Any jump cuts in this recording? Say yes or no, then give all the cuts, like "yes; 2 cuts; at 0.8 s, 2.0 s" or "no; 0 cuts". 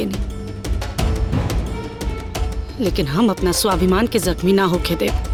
no; 0 cuts